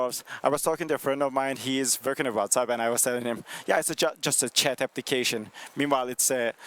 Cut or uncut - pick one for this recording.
cut